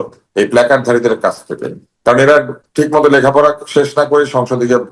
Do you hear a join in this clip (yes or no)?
no